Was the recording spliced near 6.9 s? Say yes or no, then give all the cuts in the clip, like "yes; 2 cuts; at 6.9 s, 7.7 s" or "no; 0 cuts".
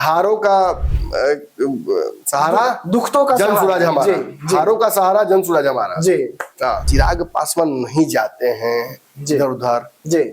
yes; 1 cut; at 6.9 s